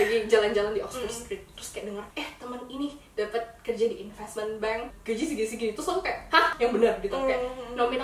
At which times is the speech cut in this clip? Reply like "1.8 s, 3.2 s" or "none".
2.1 s, 5.0 s, 6.5 s